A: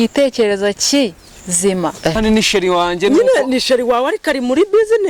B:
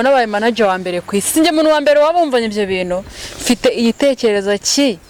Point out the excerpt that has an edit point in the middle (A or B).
A